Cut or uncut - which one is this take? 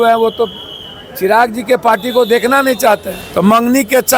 cut